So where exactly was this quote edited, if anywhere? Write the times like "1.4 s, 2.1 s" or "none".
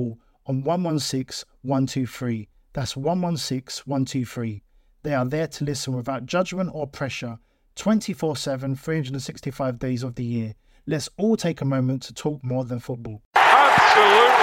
13.3 s